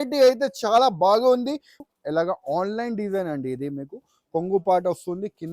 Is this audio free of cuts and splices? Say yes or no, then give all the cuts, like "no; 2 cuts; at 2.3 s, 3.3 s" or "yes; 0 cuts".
no; 1 cut; at 1.8 s